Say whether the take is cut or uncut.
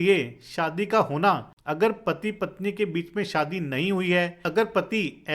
cut